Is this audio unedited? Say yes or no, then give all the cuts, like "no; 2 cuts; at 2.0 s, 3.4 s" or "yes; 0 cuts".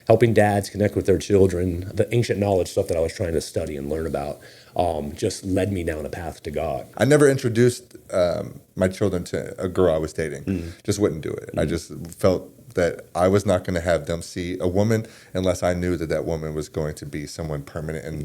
no; 2 cuts; at 1.9 s, 6.9 s